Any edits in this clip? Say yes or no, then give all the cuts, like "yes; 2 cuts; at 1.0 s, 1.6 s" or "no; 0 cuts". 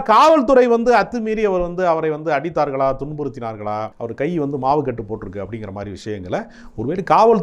yes; 1 cut; at 4.0 s